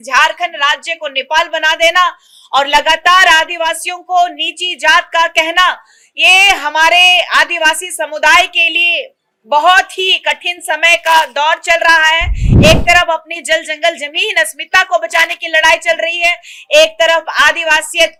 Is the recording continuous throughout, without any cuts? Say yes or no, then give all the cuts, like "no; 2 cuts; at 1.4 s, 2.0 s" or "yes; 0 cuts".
yes; 0 cuts